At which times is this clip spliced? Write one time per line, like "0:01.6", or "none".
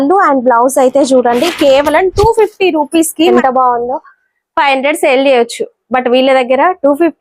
0:03.4